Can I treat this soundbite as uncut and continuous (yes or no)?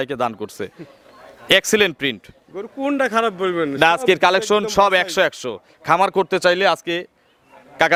yes